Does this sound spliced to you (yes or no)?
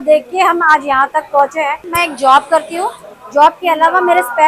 yes